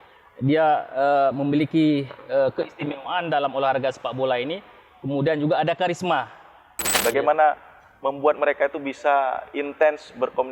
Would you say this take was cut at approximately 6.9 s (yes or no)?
yes